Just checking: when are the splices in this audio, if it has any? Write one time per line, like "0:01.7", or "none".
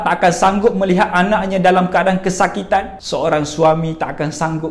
0:03.0

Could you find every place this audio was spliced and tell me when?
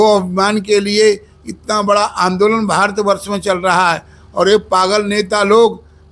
none

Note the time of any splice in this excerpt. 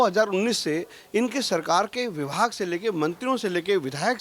none

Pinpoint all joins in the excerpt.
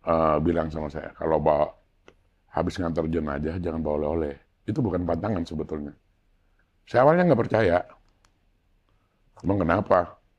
none

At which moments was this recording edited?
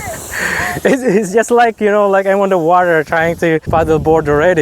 0:03.7

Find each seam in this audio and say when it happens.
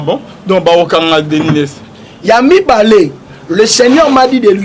none

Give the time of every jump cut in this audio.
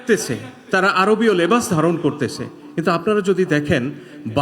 none

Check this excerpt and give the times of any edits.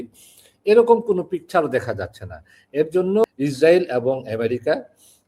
0:03.2

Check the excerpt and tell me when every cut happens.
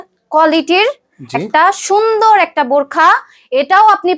none

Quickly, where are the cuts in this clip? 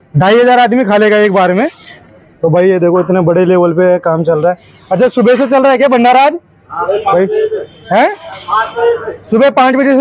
none

